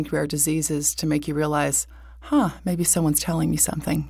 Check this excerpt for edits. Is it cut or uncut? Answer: uncut